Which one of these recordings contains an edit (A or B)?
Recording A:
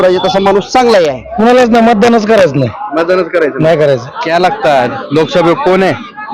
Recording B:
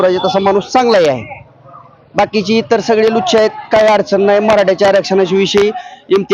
A